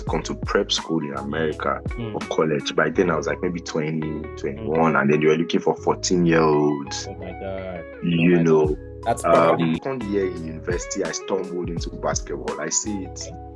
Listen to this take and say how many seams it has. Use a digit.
1